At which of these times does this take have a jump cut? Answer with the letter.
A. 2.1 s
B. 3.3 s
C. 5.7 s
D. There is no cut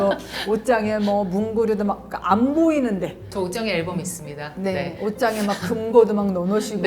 B